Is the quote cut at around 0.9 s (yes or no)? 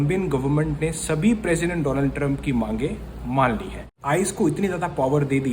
no